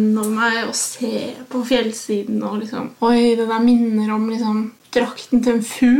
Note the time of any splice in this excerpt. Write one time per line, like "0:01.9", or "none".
0:02.8
0:04.8